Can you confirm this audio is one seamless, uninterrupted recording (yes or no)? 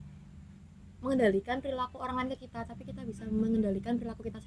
yes